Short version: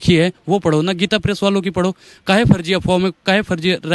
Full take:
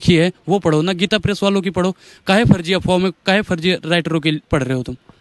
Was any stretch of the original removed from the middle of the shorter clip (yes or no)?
no